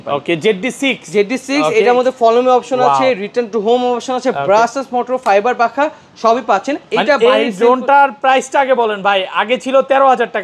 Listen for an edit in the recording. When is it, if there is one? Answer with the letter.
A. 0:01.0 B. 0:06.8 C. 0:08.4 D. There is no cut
D